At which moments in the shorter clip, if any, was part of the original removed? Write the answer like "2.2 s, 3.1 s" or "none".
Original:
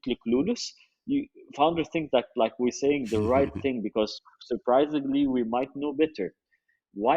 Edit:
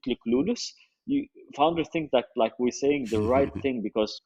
none